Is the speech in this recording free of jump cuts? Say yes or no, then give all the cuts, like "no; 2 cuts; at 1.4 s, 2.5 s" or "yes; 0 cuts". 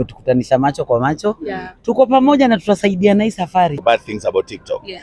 no; 1 cut; at 3.8 s